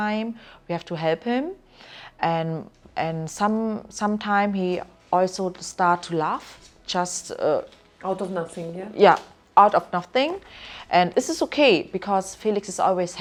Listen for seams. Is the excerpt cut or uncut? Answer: uncut